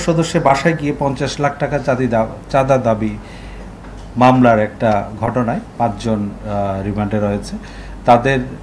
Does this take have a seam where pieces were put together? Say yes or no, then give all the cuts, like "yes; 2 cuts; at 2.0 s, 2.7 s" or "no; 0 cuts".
no; 0 cuts